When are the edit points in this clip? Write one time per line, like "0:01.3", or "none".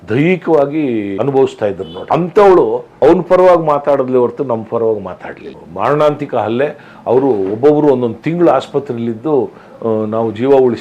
0:01.1
0:01.9
0:02.9
0:05.6